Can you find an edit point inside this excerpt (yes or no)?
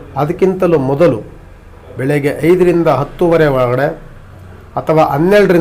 no